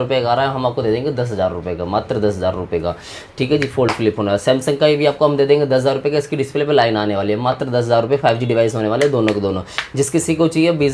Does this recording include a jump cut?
no; 0 cuts

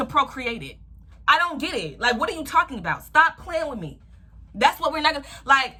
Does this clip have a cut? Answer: no; 0 cuts

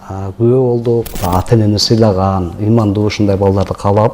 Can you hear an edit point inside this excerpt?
yes; 1 cut; at 1.2 s

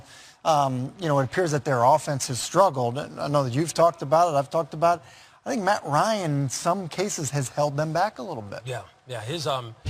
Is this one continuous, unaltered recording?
yes; 0 cuts

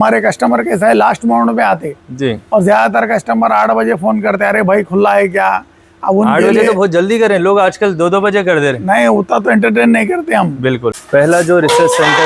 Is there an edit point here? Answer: yes; 1 cut; at 11.0 s

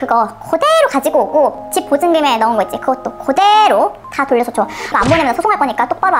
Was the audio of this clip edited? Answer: no; 0 cuts

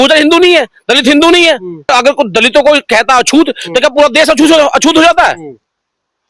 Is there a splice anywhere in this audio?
yes; 1 cut; at 1.9 s

